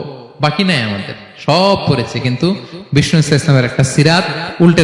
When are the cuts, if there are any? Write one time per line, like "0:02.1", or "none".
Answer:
none